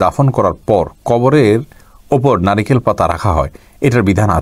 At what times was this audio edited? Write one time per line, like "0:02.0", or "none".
none

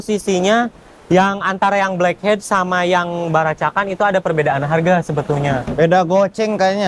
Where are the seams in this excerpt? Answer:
none

